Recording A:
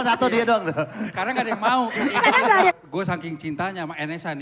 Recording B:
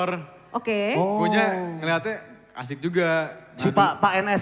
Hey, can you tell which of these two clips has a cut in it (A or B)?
A